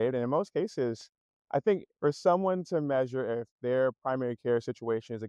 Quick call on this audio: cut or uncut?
cut